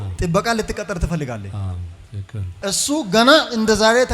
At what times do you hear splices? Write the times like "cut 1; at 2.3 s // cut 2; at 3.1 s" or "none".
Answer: cut 1; at 2.6 s